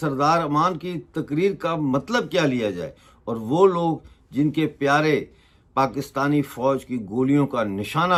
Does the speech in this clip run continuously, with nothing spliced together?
yes; 0 cuts

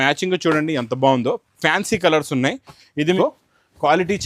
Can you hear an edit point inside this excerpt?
yes; 1 cut; at 3.2 s

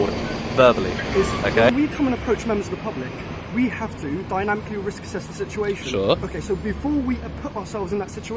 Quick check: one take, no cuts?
no; 1 cut; at 1.7 s

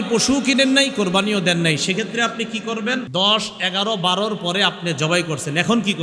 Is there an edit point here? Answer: yes; 1 cut; at 3.1 s

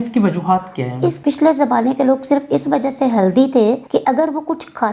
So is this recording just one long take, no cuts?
no; 2 cuts; at 1.2 s, 3.8 s

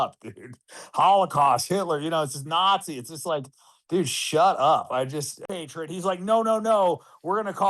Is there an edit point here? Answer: yes; 1 cut; at 5.4 s

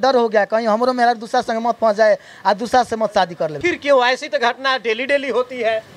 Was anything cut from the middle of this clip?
yes; 1 cut; at 3.6 s

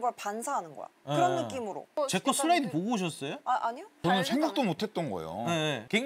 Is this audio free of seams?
yes; 0 cuts

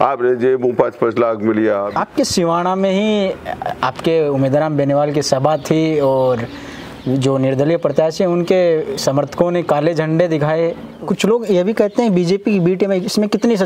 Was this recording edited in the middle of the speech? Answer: yes; 2 cuts; at 1.9 s, 10.9 s

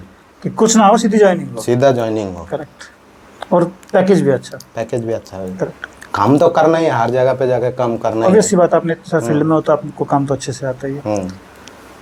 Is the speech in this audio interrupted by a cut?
no; 0 cuts

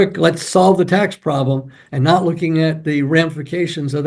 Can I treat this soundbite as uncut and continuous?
yes; 0 cuts

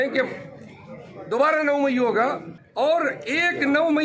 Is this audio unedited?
no; 1 cut; at 2.6 s

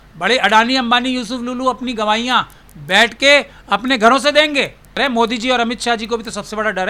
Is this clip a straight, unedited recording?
no; 1 cut; at 5.0 s

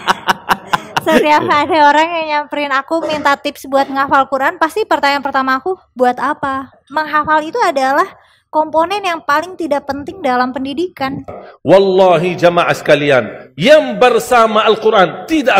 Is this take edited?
yes; 2 cuts; at 6.8 s, 11.3 s

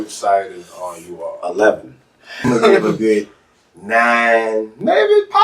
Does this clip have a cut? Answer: yes; 1 cut; at 2.5 s

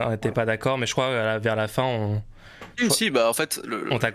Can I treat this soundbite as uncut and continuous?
yes; 0 cuts

